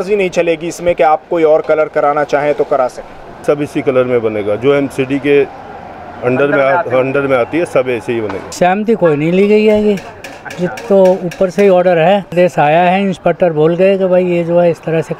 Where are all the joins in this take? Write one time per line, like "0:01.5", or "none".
0:03.4
0:08.5
0:12.3